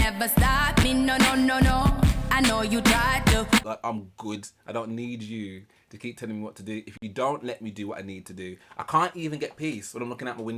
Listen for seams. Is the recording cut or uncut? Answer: cut